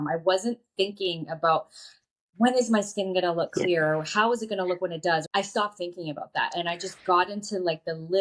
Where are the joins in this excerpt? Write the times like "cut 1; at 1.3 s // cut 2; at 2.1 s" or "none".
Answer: cut 1; at 5.3 s